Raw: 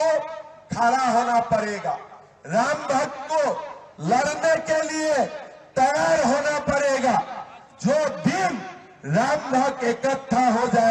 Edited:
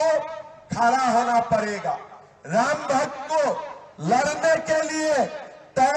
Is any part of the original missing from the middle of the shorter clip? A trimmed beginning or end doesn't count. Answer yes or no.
no